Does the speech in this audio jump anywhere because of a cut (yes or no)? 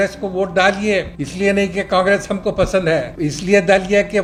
no